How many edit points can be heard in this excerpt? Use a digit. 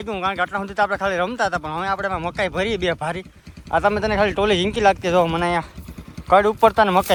0